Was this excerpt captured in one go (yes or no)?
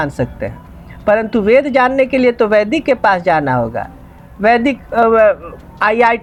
yes